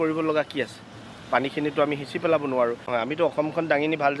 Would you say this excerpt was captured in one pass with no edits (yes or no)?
no